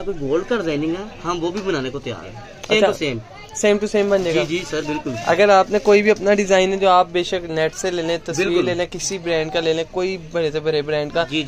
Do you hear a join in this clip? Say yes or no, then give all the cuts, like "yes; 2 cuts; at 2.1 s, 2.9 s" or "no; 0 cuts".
no; 0 cuts